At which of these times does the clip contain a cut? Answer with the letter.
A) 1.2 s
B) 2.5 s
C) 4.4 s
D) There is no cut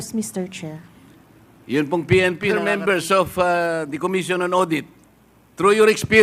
B